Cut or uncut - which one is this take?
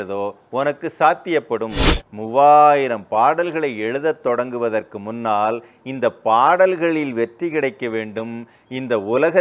cut